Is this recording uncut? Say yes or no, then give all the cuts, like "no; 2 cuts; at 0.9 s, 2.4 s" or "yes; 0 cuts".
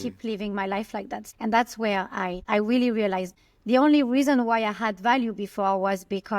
no; 3 cuts; at 1.2 s, 2.4 s, 3.3 s